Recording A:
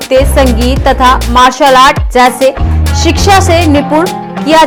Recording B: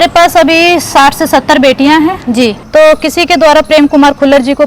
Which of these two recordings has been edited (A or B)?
B